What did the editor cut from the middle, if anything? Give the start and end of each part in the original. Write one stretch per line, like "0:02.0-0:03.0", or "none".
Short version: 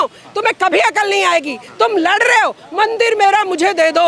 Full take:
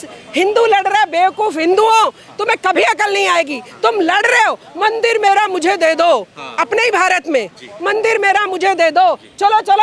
none